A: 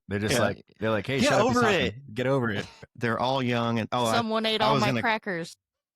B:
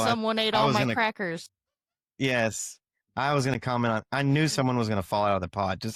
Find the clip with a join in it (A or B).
A